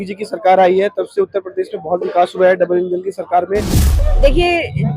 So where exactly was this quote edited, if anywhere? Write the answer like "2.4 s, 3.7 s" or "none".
3.8 s